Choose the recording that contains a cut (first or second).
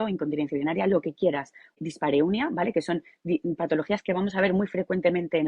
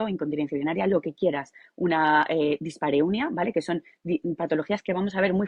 first